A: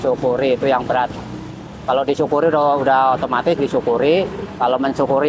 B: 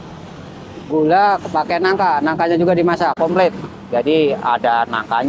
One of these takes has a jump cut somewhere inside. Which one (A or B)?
B